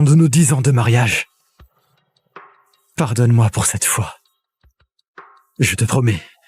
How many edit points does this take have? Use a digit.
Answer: 0